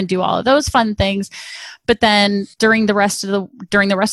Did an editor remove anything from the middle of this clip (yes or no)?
yes